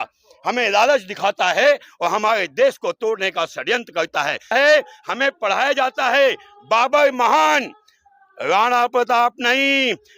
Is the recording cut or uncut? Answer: cut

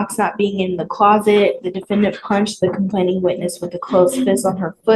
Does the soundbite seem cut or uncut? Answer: uncut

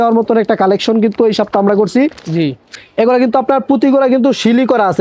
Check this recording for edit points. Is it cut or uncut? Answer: cut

